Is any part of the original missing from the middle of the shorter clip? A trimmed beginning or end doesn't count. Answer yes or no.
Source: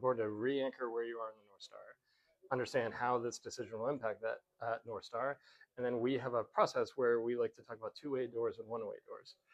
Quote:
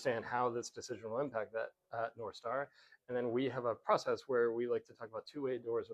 no